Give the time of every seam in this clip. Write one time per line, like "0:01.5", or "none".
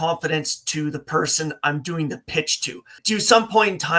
0:03.0